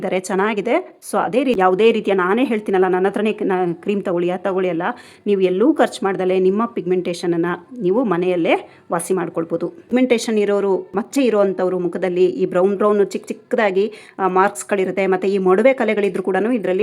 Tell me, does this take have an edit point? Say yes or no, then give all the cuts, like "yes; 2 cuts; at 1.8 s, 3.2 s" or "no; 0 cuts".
yes; 2 cuts; at 1.6 s, 9.9 s